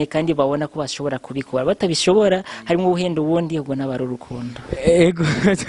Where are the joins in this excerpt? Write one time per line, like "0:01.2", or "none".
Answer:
none